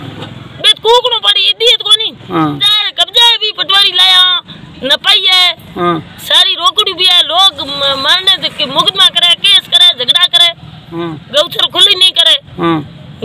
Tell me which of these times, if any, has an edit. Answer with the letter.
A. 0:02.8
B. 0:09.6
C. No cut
A